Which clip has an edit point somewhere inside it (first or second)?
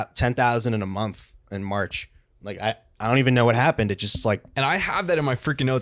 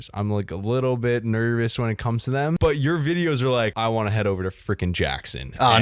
second